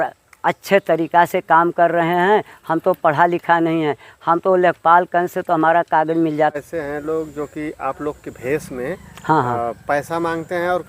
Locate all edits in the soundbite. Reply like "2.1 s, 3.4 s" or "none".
6.5 s